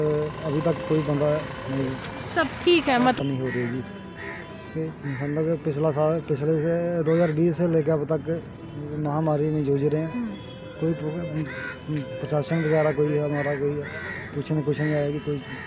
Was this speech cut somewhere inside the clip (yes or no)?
yes